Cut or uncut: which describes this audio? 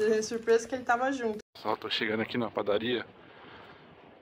cut